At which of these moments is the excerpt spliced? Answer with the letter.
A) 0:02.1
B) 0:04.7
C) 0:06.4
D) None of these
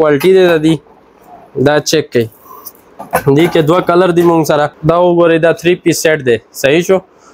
B